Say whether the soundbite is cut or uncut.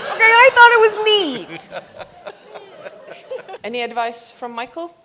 cut